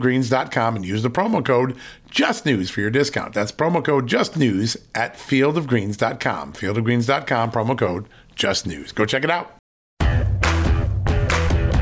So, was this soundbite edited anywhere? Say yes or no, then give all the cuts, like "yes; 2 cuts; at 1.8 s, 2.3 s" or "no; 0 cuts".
yes; 1 cut; at 10.0 s